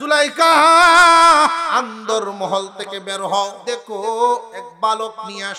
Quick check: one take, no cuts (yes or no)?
no